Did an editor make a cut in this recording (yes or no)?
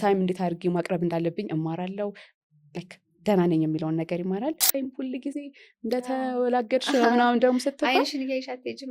yes